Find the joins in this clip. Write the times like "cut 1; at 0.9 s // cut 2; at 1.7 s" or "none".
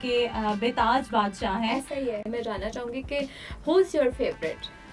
cut 1; at 2.2 s